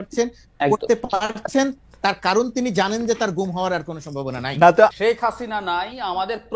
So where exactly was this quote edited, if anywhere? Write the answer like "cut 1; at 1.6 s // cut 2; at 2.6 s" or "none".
cut 1; at 4.9 s